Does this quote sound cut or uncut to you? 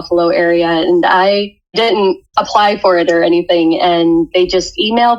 cut